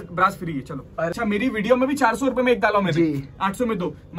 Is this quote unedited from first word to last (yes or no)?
no